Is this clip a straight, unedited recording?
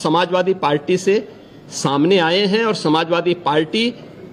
yes; 0 cuts

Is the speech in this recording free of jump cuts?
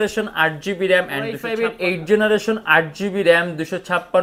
no; 1 cut; at 1.5 s

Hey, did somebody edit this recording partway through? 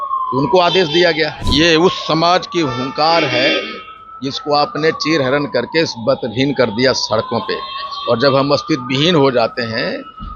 yes; 1 cut; at 1.4 s

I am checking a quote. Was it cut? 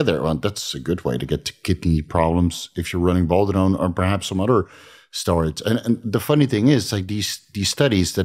no; 0 cuts

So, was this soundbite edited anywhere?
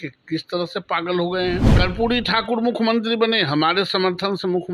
yes; 1 cut; at 1.7 s

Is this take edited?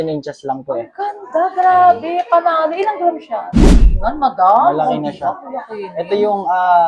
yes; 1 cut; at 3.8 s

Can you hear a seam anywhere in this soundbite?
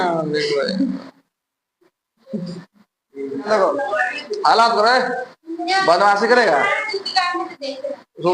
yes; 1 cut; at 3.5 s

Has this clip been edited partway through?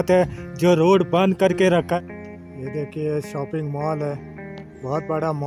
yes; 1 cut; at 2.0 s

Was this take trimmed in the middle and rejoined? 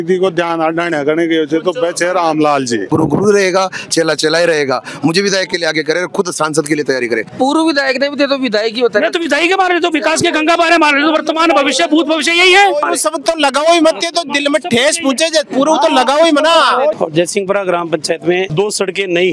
yes; 3 cuts; at 2.9 s, 7.3 s, 16.9 s

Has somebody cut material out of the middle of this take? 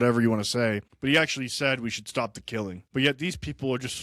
yes; 2 cuts; at 0.9 s, 2.8 s

